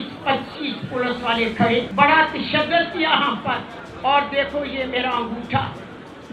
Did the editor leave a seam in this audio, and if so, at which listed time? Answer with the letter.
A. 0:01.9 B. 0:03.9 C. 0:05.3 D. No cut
A